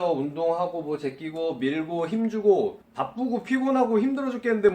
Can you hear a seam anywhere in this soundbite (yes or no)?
yes